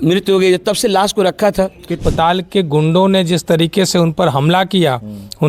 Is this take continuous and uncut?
no; 1 cut; at 1.9 s

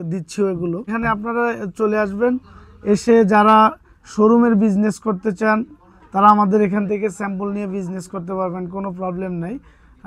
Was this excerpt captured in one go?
no; 1 cut; at 0.9 s

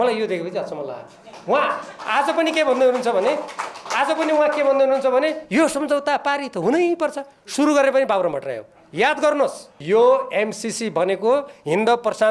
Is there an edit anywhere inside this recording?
yes; 1 cut; at 9.7 s

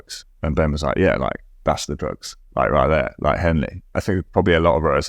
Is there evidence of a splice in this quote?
yes; 1 cut; at 3.9 s

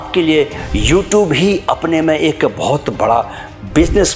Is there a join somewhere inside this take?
no; 0 cuts

